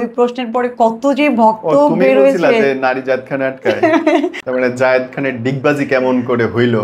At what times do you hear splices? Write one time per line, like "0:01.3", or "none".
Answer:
0:04.4

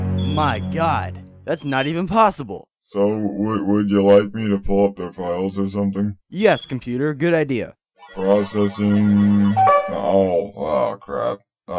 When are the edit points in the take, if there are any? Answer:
0:06.1

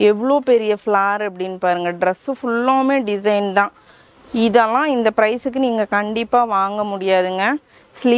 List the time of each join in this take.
none

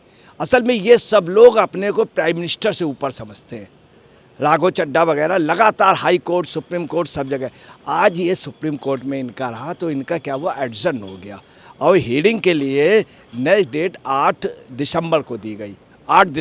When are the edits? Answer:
none

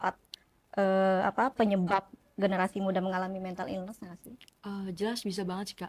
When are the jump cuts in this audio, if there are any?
none

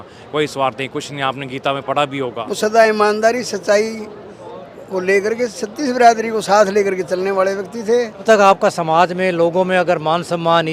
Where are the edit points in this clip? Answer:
0:02.4
0:08.2

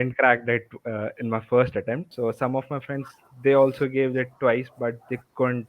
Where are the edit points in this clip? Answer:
0:02.1

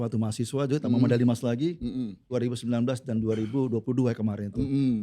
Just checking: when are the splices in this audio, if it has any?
0:02.3

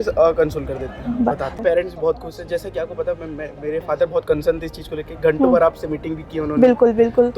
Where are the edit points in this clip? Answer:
0:01.5

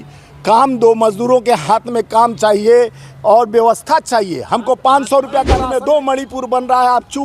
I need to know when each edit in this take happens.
0:05.6

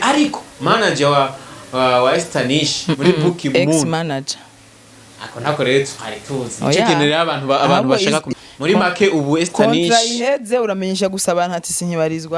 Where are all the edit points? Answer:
0:08.3

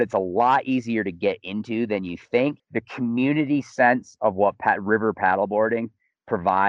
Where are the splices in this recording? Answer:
0:02.6

